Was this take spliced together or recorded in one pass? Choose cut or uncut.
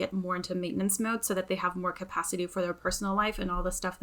uncut